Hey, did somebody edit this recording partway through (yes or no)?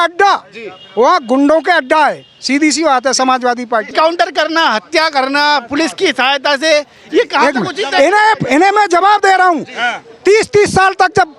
yes